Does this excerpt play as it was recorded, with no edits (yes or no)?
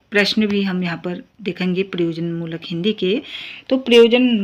yes